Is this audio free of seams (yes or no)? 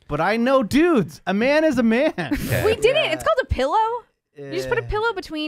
no